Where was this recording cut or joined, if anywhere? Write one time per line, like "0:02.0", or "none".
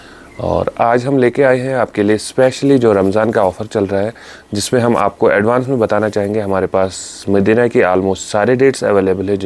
none